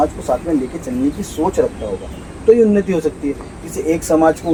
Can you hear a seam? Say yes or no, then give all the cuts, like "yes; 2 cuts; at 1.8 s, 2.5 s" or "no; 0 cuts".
no; 0 cuts